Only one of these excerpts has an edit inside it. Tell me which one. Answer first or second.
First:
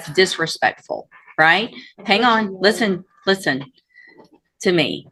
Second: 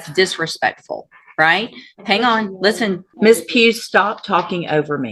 second